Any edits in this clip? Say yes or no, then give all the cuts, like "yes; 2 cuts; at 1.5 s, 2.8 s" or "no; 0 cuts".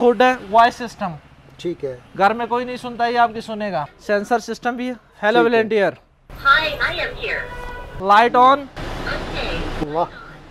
yes; 2 cuts; at 3.8 s, 8.0 s